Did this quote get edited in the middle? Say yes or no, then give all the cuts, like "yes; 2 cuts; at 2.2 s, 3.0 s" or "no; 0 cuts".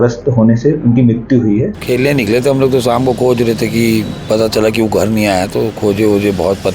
yes; 1 cut; at 1.7 s